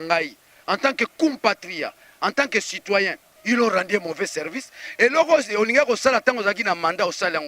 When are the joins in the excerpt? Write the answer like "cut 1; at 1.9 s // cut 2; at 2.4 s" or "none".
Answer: cut 1; at 3.3 s